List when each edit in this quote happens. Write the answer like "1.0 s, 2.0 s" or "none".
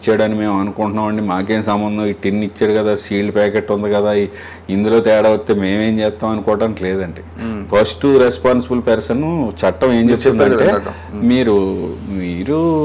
none